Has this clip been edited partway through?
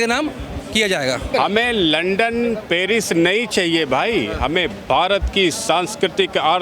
yes; 1 cut; at 1.3 s

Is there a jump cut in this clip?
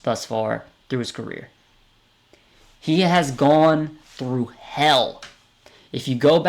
no; 0 cuts

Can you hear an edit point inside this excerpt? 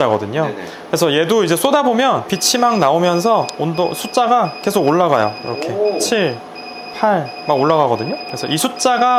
no; 0 cuts

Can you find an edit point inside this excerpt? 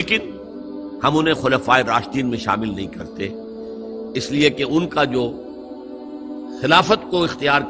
no; 0 cuts

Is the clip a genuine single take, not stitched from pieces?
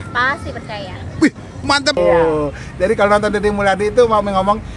no; 1 cut; at 2.0 s

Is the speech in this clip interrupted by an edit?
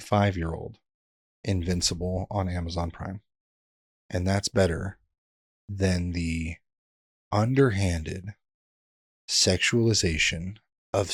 no; 0 cuts

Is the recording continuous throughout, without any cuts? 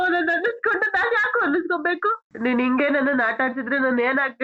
no; 1 cut; at 2.2 s

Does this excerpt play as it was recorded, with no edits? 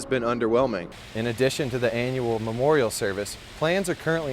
no; 1 cut; at 1.0 s

